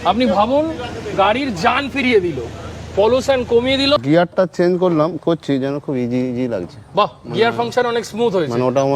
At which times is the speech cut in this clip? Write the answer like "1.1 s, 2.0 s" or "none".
4.0 s